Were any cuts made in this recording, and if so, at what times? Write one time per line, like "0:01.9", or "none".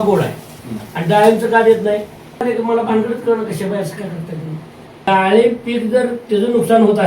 0:02.4
0:05.1